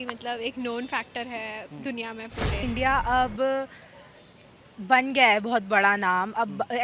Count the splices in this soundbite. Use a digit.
1